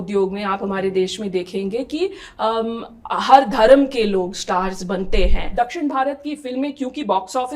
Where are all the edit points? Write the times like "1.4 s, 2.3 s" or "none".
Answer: 5.5 s